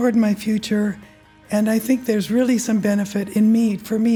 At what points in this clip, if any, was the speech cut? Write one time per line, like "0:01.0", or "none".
none